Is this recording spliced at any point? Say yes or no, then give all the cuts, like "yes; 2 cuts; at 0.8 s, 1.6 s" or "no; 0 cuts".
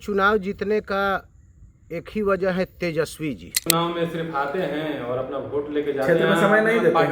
yes; 1 cut; at 3.6 s